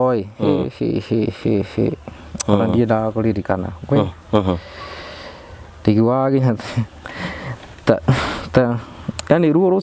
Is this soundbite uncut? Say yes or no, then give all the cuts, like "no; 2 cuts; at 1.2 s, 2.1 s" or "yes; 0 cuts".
yes; 0 cuts